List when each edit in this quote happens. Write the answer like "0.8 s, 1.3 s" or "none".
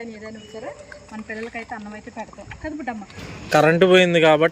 3.2 s